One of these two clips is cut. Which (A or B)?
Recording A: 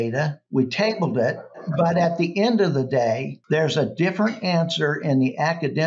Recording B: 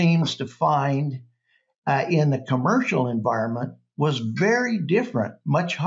A